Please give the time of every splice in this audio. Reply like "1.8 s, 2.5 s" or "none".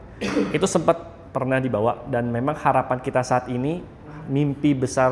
4.1 s